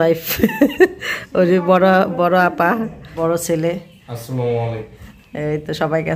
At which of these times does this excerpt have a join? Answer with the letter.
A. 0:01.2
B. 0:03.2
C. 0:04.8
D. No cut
B